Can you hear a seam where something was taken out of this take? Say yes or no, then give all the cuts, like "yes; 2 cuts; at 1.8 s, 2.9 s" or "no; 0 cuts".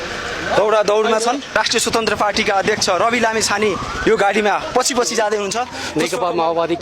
yes; 2 cuts; at 1.5 s, 5.7 s